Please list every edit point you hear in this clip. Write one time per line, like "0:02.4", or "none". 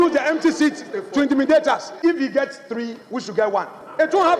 0:01.9